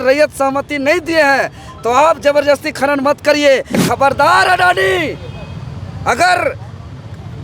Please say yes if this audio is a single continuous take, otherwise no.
no